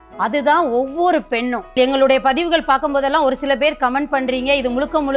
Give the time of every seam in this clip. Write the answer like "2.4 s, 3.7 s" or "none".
1.8 s